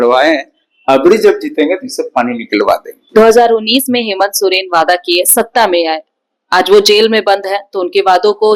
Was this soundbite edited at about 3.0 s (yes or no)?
no